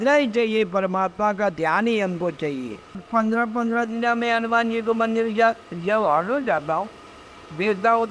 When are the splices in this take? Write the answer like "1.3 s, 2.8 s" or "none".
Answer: 3.0 s